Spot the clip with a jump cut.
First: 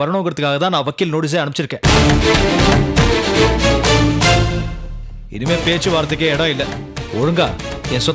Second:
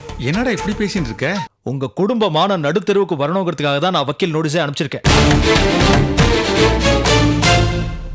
second; 1 cut; at 1.5 s

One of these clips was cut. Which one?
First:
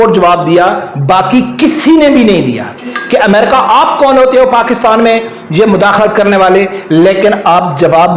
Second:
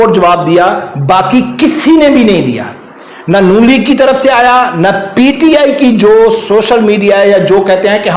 first; 1 cut; at 2.9 s

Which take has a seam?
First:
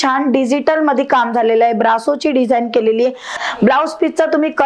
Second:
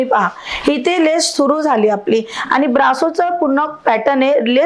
first; 1 cut; at 3.3 s

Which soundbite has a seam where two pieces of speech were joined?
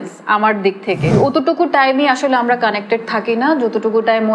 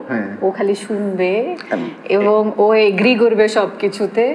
first; 1 cut; at 1.1 s

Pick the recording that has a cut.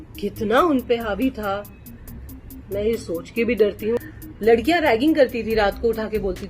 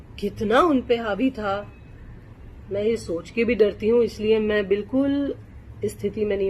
first; 1 cut; at 4.0 s

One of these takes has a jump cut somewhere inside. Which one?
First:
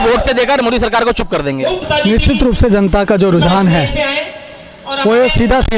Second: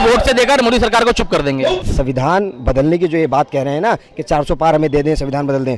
second; 1 cut; at 1.8 s

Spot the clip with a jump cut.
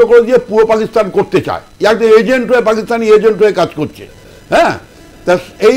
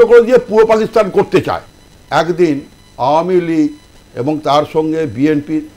second; 1 cut; at 1.6 s

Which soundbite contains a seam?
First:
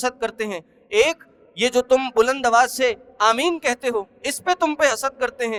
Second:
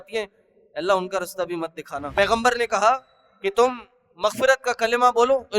second; 1 cut; at 2.1 s

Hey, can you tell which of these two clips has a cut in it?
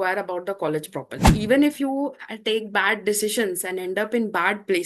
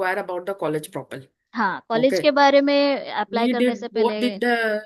first; 1 cut; at 1.3 s

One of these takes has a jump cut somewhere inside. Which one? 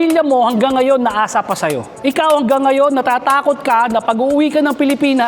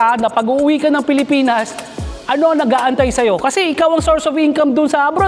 first; 1 cut; at 1.9 s

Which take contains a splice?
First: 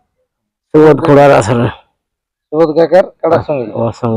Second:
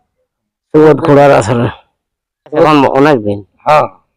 second; 1 cut; at 2.6 s

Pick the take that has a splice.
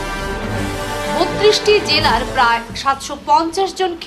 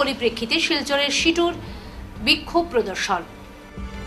first; 1 cut; at 1.0 s

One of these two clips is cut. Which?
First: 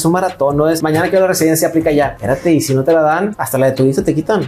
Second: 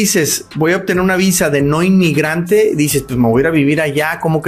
first; 3 cuts; at 0.8 s, 2.2 s, 3.4 s

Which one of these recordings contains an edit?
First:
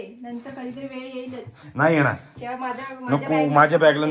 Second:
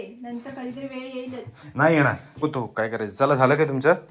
second; 1 cut; at 2.3 s

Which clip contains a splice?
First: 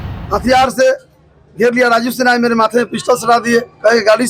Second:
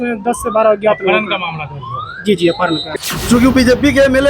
second; 1 cut; at 2.9 s

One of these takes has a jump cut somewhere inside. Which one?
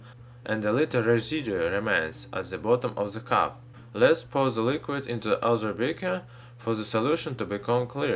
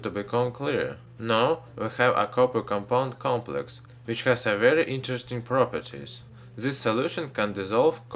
second; 1 cut; at 6.7 s

